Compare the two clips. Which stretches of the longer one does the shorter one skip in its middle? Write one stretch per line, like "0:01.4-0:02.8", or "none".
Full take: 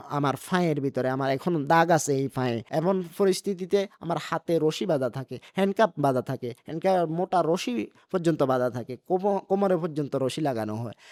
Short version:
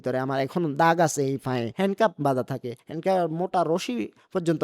0:02.6-0:05.5